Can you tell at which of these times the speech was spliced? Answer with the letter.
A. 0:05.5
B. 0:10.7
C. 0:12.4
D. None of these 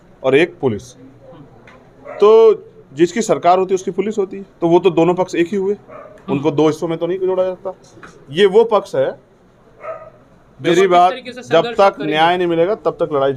B